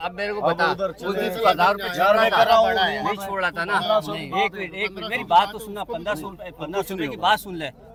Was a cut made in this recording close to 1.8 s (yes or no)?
no